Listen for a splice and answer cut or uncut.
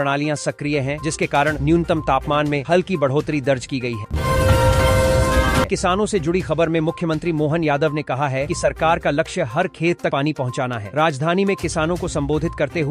cut